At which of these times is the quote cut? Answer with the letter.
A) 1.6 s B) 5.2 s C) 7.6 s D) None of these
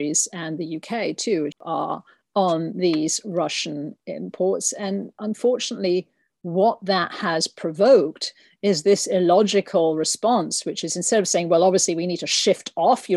A